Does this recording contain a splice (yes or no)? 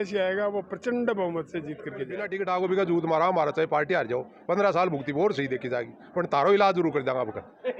yes